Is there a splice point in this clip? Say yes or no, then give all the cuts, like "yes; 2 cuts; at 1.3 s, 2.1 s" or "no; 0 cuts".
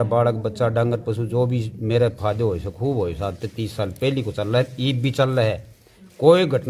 no; 0 cuts